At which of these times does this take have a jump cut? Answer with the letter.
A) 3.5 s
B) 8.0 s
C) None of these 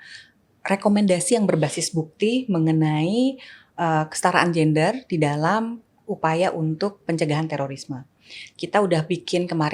C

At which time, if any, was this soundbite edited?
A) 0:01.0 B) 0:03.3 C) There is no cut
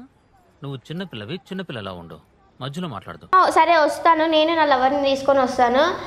B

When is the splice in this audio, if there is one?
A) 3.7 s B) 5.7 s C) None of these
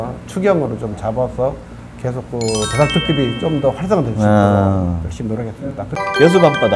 B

